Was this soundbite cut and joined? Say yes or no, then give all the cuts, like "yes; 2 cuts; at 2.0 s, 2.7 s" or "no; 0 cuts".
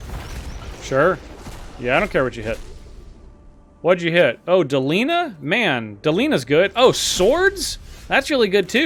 no; 0 cuts